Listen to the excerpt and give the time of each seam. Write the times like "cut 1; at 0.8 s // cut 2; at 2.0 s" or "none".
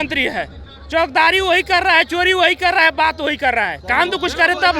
none

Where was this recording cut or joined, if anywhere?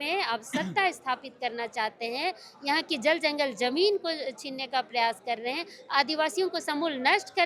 none

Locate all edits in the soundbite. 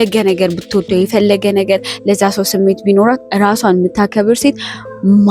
none

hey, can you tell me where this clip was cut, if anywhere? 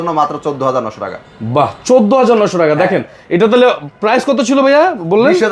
none

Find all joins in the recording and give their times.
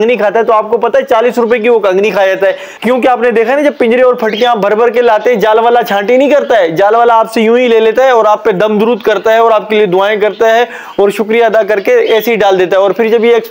cut 1; at 2.7 s

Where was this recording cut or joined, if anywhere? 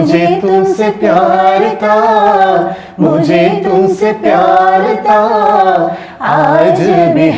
none

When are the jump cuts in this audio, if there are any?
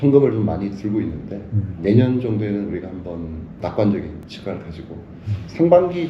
cut 1; at 1.7 s // cut 2; at 3.5 s // cut 3; at 4.3 s

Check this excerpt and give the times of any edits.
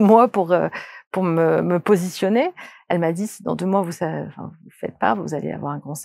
none

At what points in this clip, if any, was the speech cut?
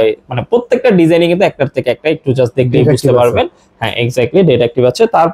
none

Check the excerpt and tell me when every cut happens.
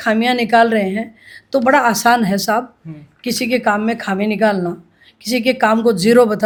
none

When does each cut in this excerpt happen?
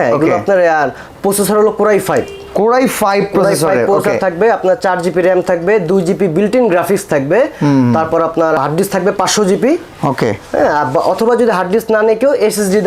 none

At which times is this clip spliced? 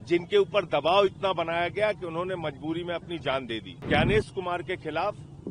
cut 1; at 3.8 s

